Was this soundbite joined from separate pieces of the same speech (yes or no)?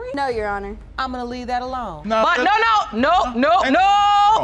yes